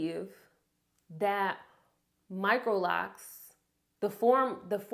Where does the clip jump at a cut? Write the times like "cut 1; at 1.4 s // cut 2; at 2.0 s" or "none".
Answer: none